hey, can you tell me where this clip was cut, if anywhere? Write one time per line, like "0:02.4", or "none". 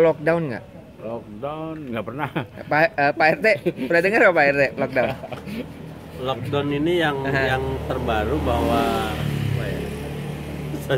none